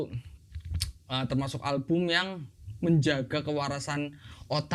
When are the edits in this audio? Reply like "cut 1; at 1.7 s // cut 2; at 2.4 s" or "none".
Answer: none